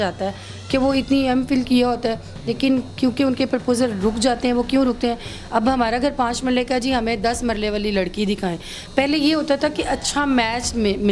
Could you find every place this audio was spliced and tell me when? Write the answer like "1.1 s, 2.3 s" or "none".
none